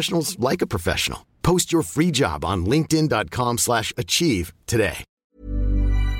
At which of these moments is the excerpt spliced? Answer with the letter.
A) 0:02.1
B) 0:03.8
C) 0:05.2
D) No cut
C